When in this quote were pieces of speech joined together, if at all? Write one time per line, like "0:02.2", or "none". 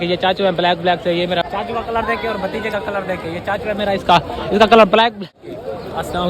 0:01.4
0:05.2